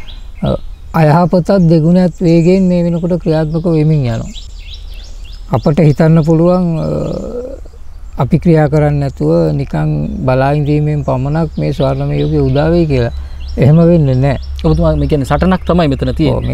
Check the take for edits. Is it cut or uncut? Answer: uncut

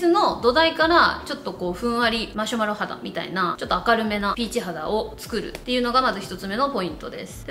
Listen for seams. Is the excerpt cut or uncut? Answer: uncut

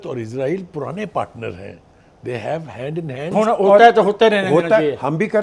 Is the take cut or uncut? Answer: cut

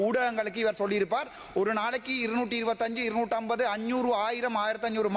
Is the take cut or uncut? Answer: uncut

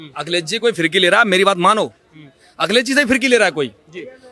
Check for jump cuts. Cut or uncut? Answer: uncut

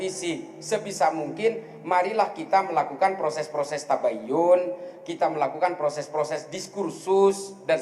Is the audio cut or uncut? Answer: uncut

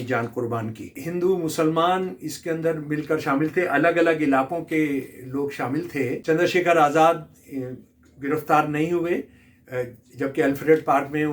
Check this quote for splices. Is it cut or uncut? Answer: cut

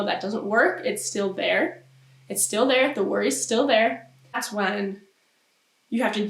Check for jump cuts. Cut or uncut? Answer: cut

